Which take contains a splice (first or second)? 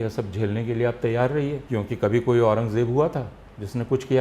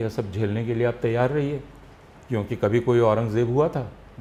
first